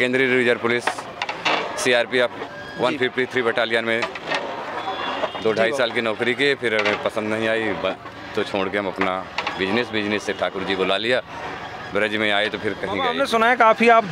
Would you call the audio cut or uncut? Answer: cut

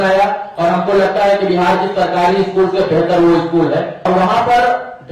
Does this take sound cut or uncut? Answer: cut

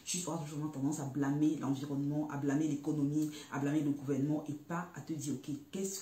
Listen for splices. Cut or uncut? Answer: uncut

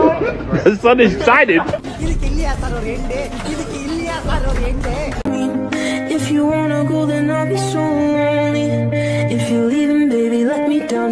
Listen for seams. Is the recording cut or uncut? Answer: cut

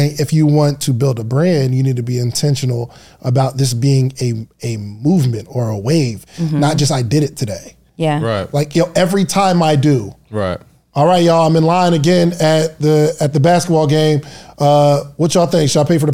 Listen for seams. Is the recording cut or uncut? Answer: uncut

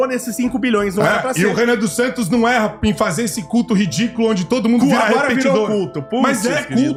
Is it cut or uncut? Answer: uncut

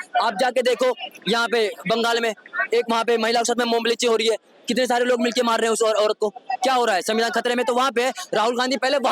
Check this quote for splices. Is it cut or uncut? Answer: uncut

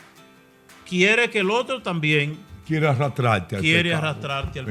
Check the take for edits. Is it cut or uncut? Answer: uncut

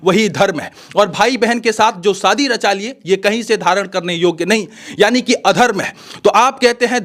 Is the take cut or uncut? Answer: uncut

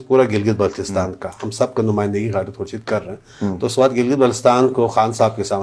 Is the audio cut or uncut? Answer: uncut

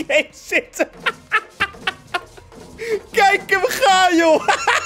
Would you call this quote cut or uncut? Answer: uncut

